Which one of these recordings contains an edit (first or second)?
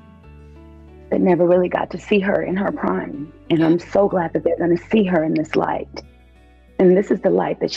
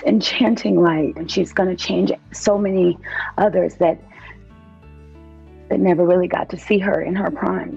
second